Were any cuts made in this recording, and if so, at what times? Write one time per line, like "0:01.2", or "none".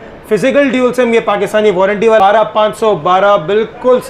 0:02.2